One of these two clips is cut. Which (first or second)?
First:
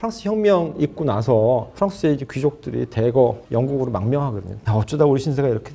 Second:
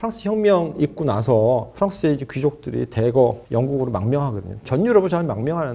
first